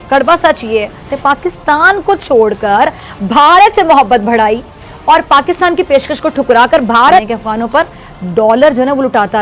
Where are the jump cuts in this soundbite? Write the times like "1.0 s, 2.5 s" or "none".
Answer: none